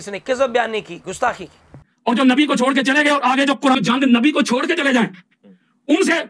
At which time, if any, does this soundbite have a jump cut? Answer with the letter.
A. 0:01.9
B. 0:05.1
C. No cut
A